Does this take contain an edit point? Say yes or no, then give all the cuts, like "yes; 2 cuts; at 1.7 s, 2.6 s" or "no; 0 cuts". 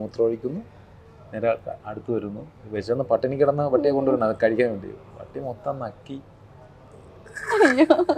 no; 0 cuts